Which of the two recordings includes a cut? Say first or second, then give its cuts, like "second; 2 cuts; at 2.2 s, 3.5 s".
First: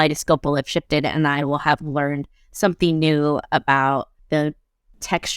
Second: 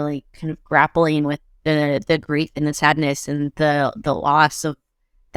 first; 1 cut; at 4.2 s